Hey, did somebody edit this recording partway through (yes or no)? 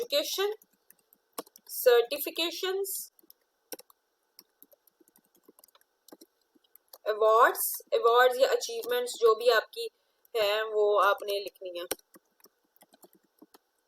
no